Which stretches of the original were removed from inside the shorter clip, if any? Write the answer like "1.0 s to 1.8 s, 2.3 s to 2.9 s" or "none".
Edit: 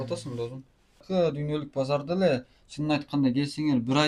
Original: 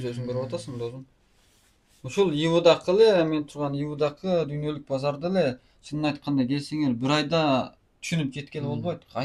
1.5 s to 4.2 s

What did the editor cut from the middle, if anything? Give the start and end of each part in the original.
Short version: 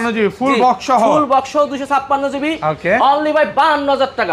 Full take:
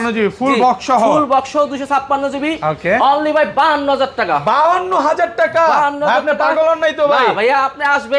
none

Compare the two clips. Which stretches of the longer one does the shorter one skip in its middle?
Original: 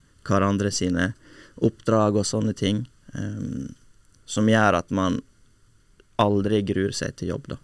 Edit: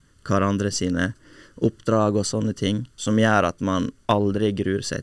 2.9 s to 4.2 s, 5.3 s to 6.1 s

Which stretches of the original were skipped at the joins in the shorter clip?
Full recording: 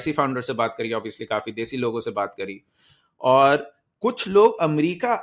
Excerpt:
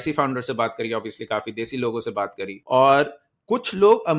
2.5 s to 3.0 s

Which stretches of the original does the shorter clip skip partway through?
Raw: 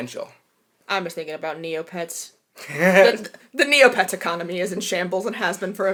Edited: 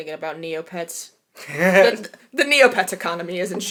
none

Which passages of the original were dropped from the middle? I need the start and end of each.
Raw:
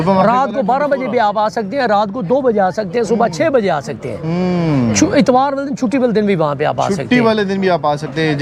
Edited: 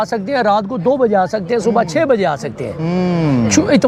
none

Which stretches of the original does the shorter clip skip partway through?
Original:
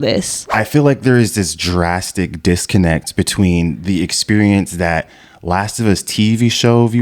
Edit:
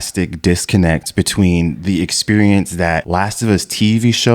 5.0 s to 5.4 s

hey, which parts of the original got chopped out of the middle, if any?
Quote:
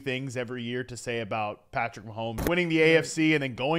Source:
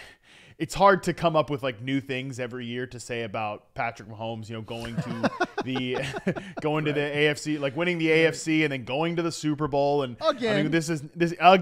4.5 s to 7.7 s

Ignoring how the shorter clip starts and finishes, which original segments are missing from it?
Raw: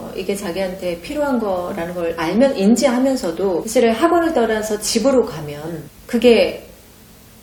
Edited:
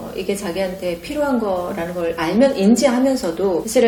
none

